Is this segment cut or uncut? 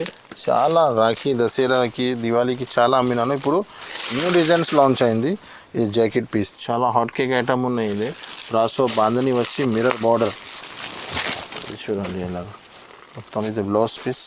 cut